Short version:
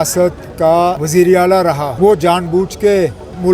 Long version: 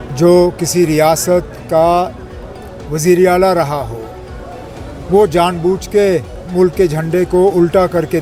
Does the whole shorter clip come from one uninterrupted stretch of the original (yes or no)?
no